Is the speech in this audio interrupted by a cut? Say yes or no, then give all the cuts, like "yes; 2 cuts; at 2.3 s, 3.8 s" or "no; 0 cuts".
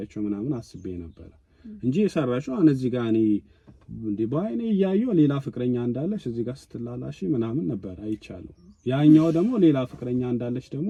no; 0 cuts